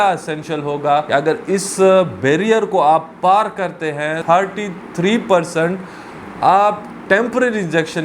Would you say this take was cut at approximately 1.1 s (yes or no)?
yes